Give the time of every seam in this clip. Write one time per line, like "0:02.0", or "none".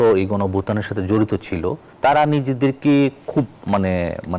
0:01.9
0:03.6